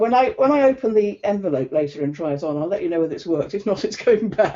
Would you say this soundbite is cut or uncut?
uncut